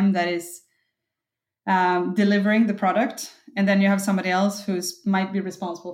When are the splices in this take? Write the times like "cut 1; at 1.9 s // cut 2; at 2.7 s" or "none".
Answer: none